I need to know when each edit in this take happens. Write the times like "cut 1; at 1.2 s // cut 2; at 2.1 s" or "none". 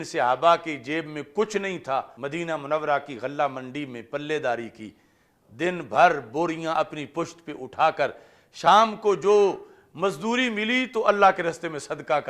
cut 1; at 2.1 s